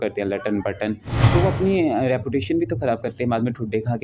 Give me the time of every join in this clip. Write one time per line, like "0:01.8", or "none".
0:01.1